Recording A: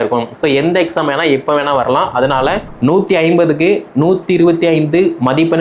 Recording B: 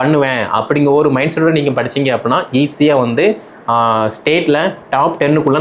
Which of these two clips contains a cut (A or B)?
A